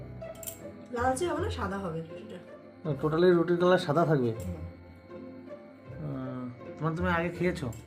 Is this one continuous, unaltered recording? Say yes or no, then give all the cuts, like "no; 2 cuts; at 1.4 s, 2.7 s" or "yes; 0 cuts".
yes; 0 cuts